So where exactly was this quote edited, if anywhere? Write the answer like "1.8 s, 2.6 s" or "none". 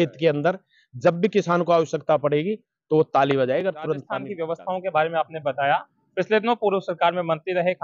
4.2 s